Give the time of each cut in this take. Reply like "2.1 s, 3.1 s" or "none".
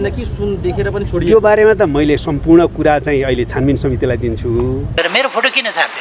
4.9 s